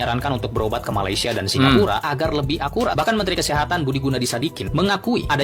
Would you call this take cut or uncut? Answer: uncut